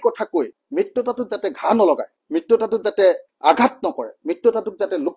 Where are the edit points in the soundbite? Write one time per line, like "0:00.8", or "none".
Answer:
none